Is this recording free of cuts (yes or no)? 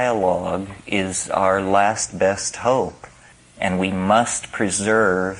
yes